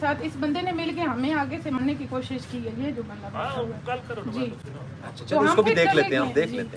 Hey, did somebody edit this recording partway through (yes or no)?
no